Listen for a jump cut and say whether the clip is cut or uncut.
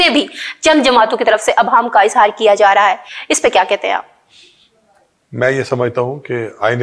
uncut